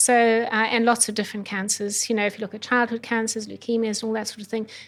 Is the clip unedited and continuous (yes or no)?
yes